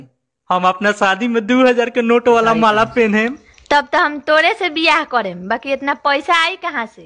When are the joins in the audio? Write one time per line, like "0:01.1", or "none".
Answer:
none